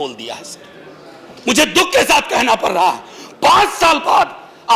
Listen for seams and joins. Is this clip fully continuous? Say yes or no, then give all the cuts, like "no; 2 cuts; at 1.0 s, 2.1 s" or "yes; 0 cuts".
yes; 0 cuts